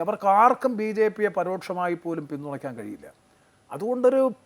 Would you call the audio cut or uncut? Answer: uncut